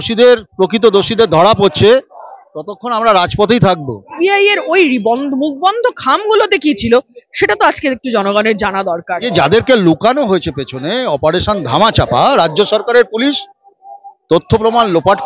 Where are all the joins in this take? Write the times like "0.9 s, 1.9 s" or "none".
4.2 s, 9.3 s